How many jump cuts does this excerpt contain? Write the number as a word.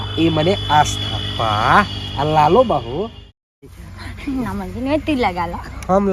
one